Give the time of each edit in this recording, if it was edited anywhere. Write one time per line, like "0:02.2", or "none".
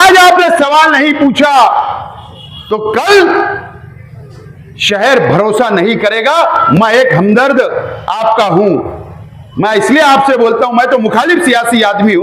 none